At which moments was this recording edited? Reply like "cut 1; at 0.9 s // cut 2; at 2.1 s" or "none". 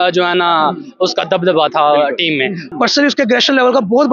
cut 1; at 2.7 s